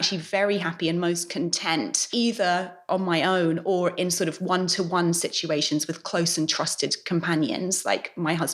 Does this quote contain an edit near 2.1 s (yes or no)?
yes